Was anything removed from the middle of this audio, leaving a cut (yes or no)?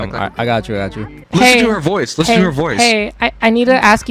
yes